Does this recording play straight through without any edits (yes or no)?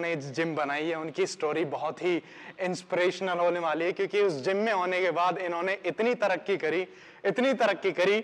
yes